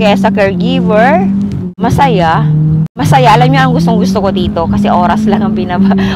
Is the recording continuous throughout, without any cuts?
no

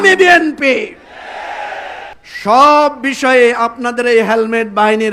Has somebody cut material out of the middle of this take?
yes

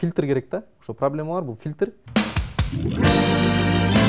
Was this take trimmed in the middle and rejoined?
yes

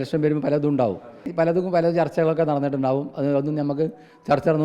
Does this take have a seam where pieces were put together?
yes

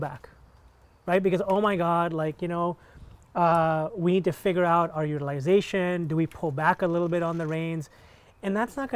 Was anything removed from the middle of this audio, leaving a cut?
no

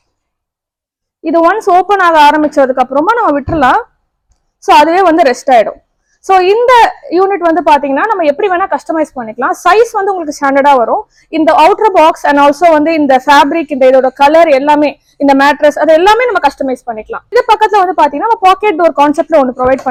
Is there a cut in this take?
no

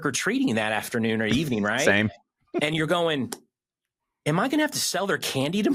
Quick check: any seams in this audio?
no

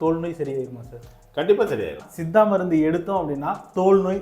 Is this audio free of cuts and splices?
no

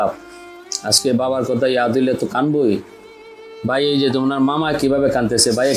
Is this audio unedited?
yes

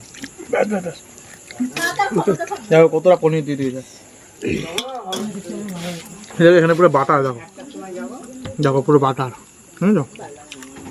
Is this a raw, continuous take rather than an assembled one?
no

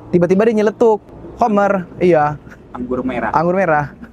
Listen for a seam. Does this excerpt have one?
yes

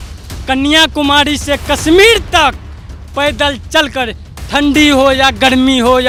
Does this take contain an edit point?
no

